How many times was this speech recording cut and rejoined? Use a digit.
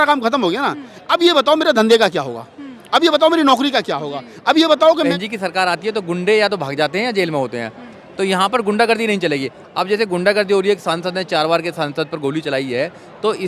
1